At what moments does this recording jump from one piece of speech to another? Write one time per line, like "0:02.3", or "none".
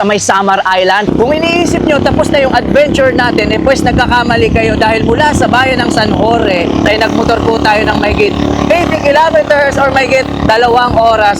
0:01.0
0:06.9